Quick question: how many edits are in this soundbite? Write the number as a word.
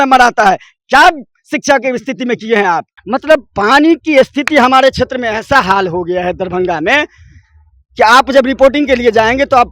one